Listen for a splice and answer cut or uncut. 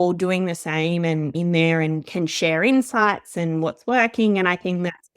cut